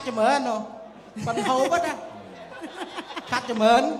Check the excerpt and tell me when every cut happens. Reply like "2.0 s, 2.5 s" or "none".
none